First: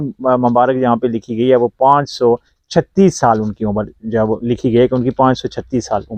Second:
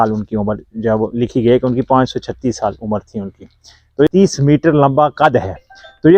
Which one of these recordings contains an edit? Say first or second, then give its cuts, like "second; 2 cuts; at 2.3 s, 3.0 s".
second; 1 cut; at 4.1 s